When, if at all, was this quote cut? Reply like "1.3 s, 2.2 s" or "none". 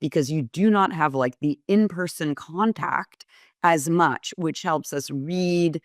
none